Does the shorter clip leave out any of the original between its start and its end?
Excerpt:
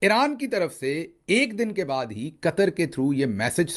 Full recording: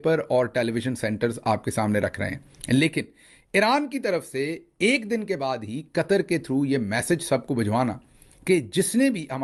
no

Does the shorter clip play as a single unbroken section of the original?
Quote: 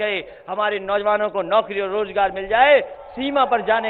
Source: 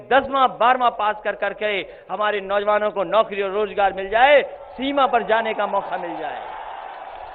yes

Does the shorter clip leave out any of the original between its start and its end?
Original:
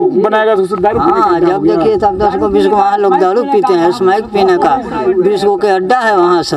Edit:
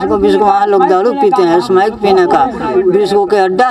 no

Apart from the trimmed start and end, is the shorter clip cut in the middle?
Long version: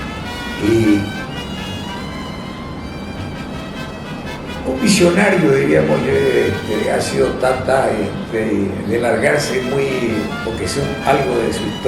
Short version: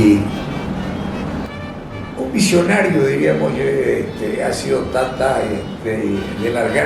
yes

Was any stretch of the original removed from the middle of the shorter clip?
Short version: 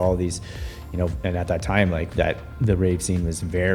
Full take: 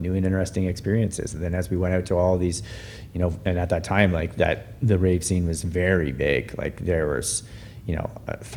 no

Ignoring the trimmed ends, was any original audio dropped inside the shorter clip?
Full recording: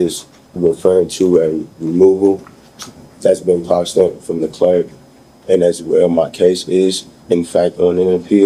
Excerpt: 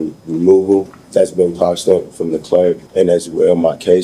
yes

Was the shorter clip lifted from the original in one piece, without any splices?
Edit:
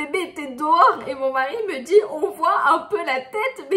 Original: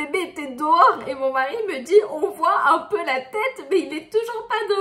yes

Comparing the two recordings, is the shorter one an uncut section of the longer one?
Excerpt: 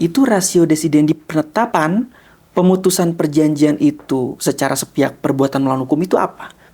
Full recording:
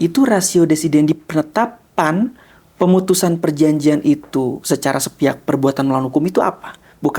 no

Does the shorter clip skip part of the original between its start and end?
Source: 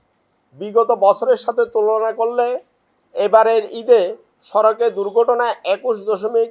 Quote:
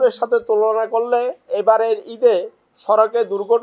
yes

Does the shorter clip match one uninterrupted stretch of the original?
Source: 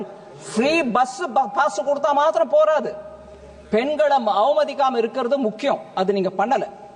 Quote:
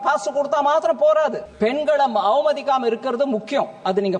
no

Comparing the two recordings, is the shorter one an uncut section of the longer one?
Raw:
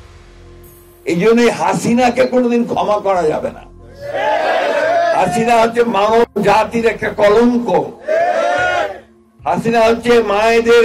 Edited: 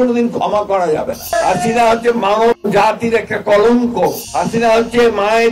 no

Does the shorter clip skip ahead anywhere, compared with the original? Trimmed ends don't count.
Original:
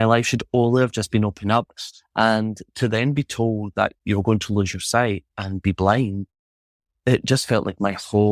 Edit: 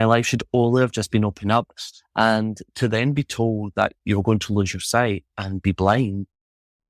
no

